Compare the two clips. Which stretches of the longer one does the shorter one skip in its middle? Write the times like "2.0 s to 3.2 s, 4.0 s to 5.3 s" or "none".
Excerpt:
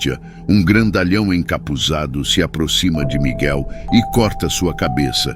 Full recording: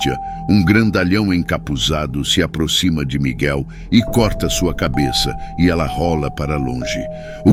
none

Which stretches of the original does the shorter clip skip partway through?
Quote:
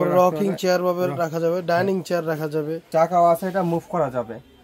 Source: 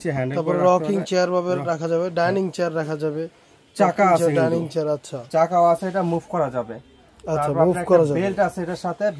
3.3 s to 5.2 s

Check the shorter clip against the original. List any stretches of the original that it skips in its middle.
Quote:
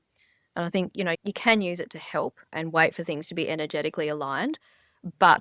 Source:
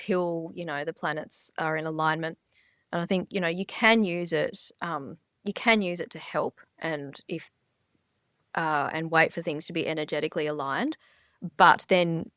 3.5 s to 5.4 s, 6.7 s to 8.9 s

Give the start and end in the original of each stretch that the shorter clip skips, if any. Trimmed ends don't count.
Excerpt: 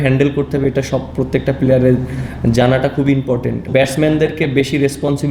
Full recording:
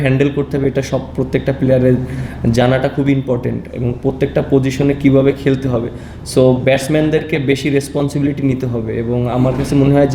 3.7 s to 6.6 s

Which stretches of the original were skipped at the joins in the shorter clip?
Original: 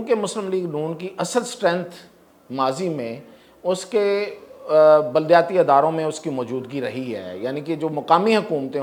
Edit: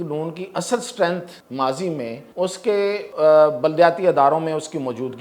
2.0 s to 2.4 s, 3.2 s to 3.5 s, 4.3 s to 4.6 s

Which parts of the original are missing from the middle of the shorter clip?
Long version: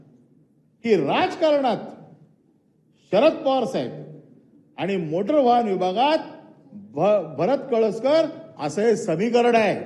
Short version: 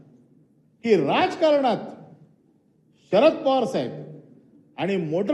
none

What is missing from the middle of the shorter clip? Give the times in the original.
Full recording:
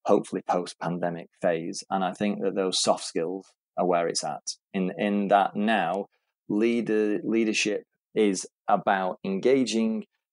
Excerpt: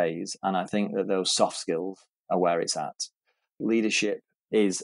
5.0 s to 7.2 s

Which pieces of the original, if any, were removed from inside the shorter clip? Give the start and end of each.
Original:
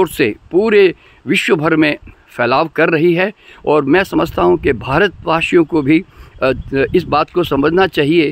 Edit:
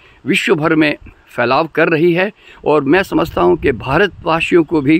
none

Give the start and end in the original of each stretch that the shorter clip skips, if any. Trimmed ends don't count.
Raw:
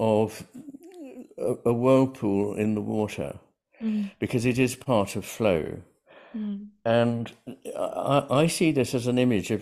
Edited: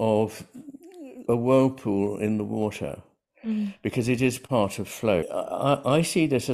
1.2 s to 1.6 s, 5.6 s to 7.7 s

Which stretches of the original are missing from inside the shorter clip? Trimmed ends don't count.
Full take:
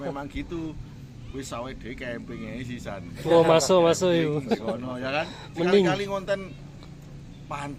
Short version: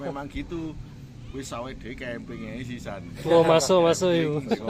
none

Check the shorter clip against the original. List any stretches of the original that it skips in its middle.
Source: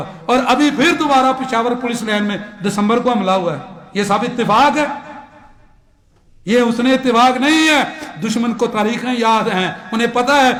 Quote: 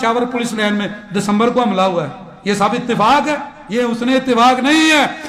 5.0 s to 6.3 s

